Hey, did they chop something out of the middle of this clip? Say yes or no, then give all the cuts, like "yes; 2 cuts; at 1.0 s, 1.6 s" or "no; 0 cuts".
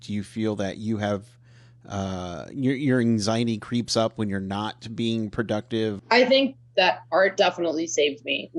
yes; 1 cut; at 6.0 s